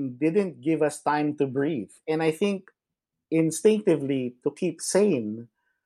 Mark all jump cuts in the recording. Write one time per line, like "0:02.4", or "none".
0:01.9